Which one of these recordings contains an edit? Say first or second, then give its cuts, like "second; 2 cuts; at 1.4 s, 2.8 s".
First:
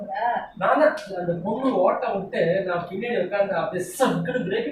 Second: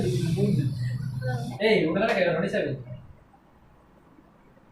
second; 1 cut; at 1.5 s